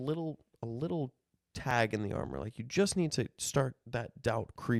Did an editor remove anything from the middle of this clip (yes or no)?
no